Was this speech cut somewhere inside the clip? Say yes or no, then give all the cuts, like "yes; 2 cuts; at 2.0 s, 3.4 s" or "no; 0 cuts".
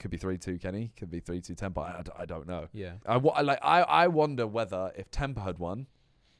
yes; 1 cut; at 2.9 s